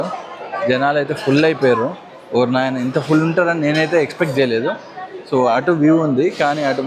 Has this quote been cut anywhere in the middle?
no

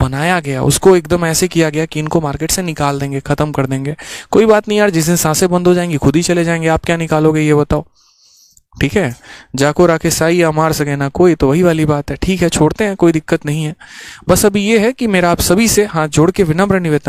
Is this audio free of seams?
yes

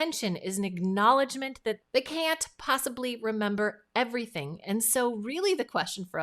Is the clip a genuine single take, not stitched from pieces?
no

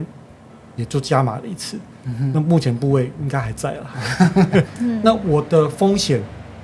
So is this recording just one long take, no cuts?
yes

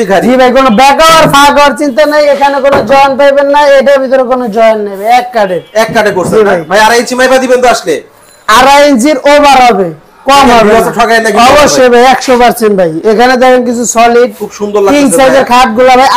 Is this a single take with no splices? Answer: yes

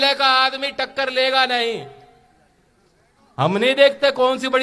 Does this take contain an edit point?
no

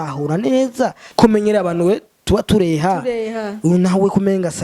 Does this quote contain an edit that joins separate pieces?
yes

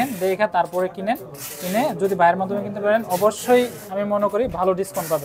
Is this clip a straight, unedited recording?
yes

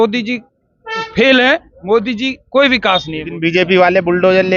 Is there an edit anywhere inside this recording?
yes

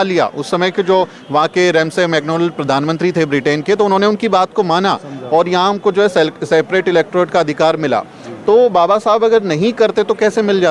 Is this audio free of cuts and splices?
yes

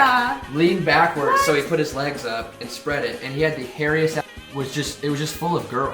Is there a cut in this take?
yes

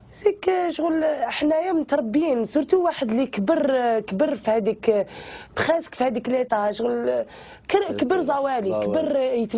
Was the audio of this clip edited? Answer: yes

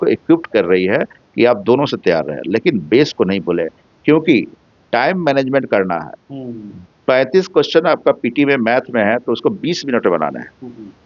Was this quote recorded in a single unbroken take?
yes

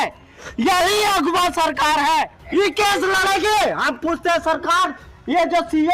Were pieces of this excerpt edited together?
yes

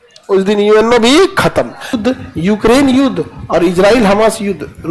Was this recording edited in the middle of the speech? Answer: yes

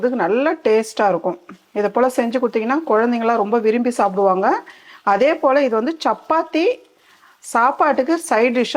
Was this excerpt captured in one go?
yes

